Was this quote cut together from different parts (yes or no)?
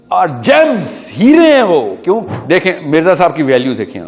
yes